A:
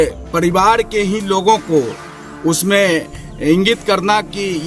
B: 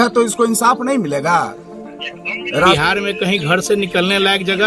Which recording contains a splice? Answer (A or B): B